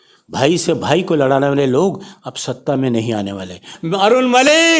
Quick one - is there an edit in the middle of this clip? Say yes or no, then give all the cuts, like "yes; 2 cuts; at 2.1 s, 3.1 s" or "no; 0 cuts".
yes; 1 cut; at 3.7 s